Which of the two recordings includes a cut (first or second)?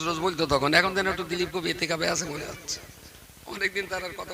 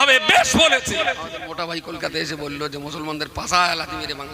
second